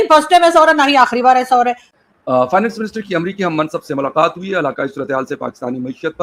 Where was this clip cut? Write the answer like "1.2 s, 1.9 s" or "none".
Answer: 1.9 s